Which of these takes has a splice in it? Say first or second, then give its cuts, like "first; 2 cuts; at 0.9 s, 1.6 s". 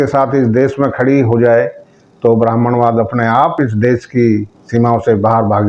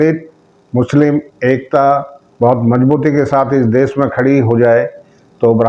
first; 1 cut; at 3.5 s